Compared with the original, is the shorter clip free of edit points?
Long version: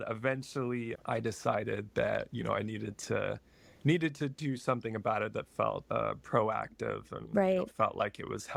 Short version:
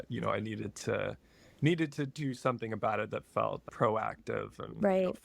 no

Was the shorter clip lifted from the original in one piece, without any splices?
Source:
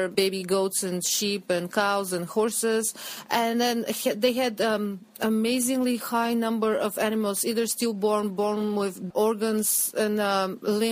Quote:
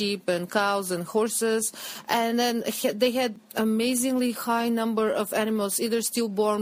no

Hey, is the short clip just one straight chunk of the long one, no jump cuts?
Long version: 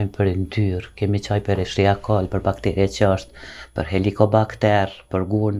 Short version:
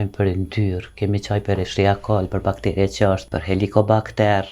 no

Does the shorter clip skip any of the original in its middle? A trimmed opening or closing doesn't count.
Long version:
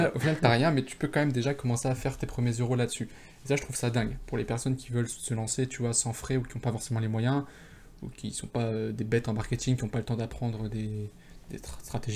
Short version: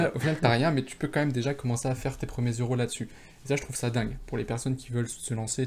no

